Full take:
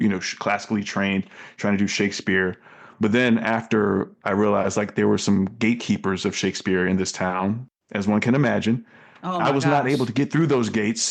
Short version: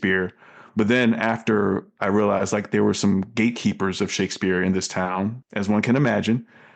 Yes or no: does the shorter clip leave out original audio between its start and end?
yes